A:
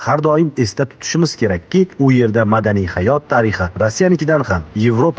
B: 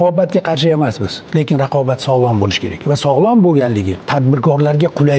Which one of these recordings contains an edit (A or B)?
B